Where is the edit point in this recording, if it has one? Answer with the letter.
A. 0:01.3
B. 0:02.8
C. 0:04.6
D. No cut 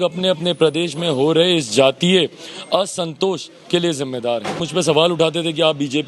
C